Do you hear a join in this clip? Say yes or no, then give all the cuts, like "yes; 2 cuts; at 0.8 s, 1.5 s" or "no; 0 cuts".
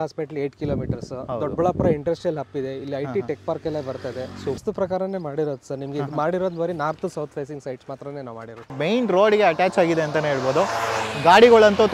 yes; 2 cuts; at 4.6 s, 8.8 s